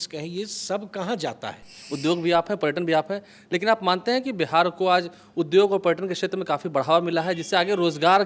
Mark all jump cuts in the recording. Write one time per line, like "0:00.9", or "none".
0:01.8

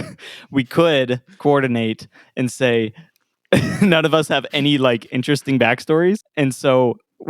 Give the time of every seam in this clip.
0:06.3

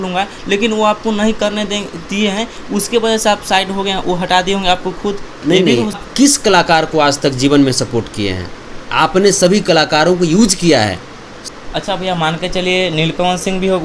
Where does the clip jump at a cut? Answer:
0:06.0
0:11.4

